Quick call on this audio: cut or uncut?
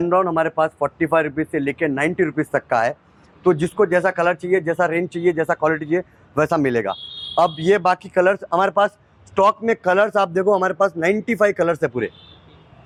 uncut